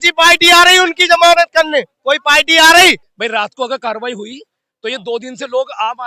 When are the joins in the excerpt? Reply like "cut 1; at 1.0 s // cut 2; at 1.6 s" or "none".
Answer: cut 1; at 3.1 s